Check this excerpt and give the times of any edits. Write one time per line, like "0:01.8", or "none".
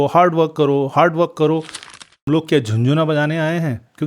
0:02.1